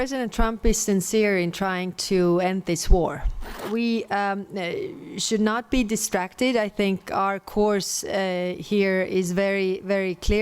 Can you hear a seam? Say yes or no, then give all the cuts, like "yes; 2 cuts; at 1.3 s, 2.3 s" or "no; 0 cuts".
yes; 1 cut; at 3.6 s